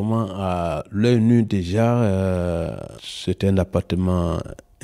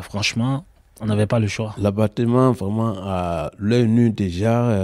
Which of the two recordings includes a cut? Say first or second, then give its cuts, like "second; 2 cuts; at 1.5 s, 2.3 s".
second; 1 cut; at 1.7 s